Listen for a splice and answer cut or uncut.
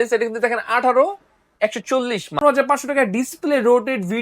cut